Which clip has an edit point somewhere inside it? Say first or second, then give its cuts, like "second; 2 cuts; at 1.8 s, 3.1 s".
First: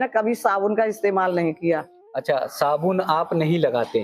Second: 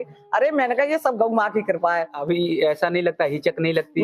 second; 1 cut; at 2.2 s